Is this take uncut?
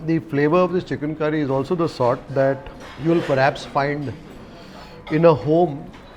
yes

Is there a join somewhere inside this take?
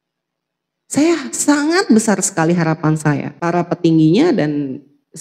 yes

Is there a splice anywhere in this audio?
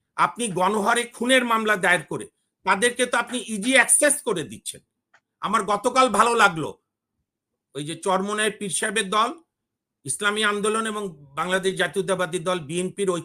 no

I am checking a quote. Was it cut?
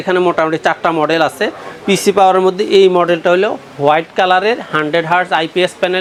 no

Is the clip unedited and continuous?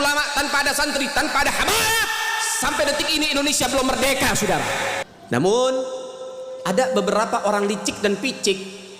no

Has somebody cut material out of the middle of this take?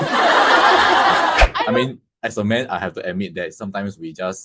yes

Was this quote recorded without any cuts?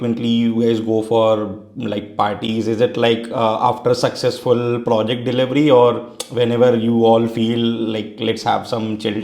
yes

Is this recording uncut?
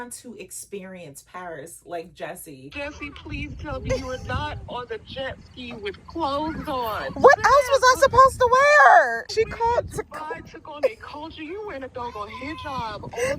no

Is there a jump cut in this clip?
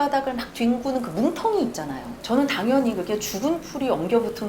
yes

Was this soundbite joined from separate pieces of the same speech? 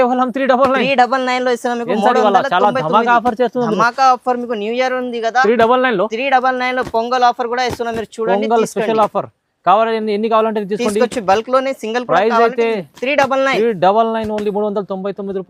no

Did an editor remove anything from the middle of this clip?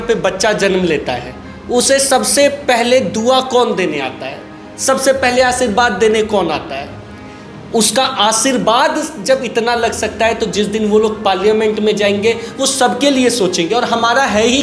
no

